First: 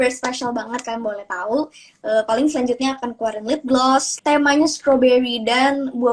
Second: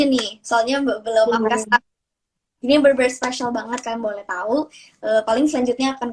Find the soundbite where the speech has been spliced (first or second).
first